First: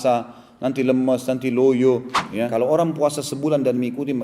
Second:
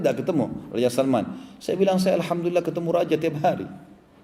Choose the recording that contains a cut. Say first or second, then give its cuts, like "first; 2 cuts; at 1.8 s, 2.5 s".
first; 1 cut; at 2.5 s